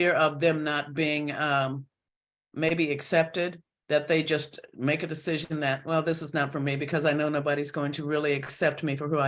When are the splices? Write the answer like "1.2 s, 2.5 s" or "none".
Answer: none